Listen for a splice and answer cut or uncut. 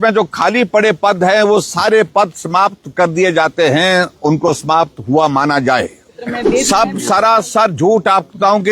cut